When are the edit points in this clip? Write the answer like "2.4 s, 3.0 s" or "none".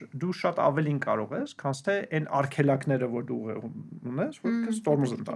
none